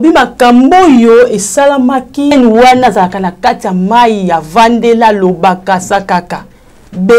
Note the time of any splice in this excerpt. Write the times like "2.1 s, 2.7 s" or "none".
2.3 s